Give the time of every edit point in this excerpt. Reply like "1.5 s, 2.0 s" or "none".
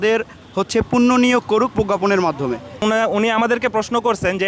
2.8 s